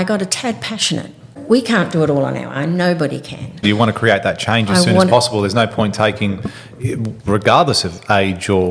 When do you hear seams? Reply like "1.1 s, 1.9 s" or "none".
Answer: 1.3 s, 3.6 s

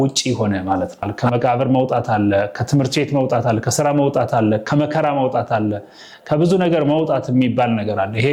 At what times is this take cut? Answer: 1.1 s

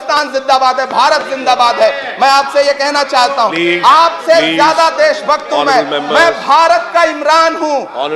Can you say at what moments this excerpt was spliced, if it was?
none

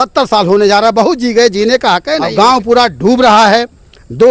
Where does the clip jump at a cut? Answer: 2.3 s

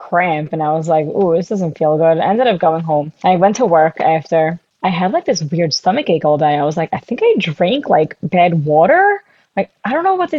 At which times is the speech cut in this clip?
3.1 s, 4.7 s

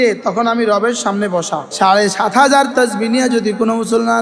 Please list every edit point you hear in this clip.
1.6 s

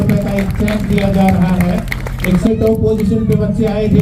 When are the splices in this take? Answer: none

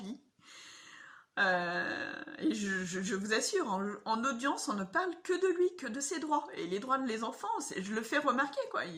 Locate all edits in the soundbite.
none

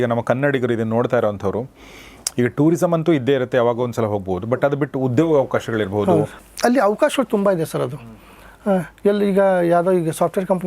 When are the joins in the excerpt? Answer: 6.4 s

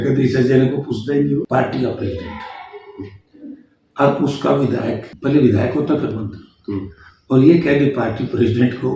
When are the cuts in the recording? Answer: 1.5 s, 5.1 s

